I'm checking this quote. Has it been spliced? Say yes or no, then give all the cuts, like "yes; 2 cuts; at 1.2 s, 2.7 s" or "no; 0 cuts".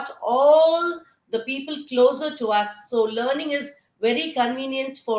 no; 0 cuts